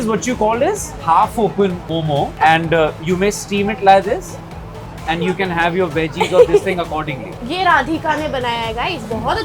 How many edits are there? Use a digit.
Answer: 2